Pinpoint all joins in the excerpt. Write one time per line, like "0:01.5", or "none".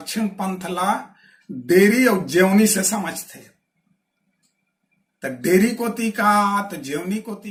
none